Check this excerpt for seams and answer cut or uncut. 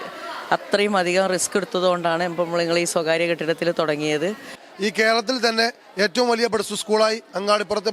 cut